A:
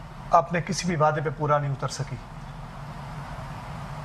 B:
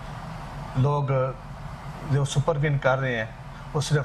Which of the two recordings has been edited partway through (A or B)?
A